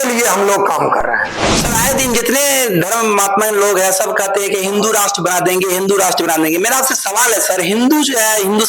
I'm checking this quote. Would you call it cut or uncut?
cut